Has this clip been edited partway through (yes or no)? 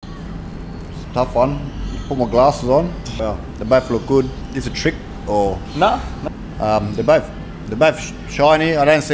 no